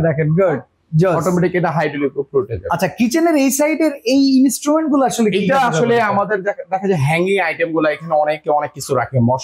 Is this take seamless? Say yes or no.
yes